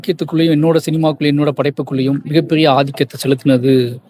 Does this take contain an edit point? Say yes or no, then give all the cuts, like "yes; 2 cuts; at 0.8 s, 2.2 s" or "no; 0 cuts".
no; 0 cuts